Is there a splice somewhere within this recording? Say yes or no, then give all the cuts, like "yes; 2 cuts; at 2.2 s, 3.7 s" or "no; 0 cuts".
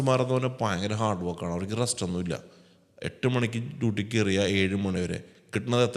no; 0 cuts